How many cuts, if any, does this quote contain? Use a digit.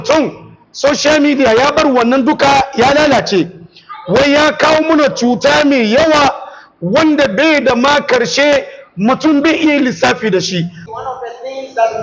1